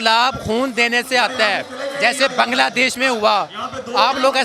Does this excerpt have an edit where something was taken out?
no; 0 cuts

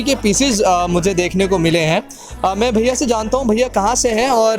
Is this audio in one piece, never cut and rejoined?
yes; 0 cuts

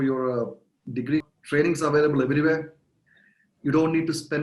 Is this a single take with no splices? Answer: no; 1 cut; at 1.3 s

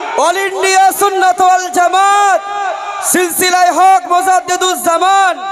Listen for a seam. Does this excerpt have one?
no; 0 cuts

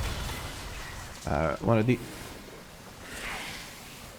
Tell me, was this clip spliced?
no; 0 cuts

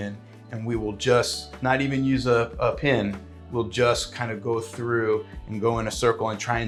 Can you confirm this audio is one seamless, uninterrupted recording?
yes; 0 cuts

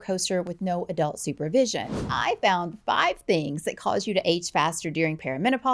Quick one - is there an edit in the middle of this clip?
yes; 1 cut; at 2.0 s

